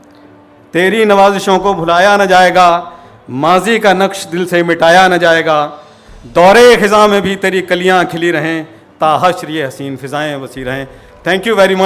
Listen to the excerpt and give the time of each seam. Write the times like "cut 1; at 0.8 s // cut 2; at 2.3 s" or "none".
none